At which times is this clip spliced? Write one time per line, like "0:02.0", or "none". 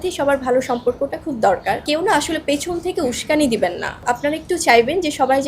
0:01.8
0:04.0